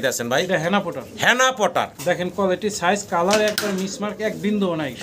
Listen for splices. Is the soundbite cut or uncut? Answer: uncut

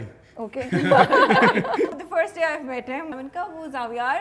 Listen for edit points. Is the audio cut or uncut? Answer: cut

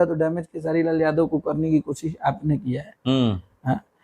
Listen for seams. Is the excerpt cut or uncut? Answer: uncut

